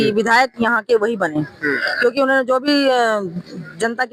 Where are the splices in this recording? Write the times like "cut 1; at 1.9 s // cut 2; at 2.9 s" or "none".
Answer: none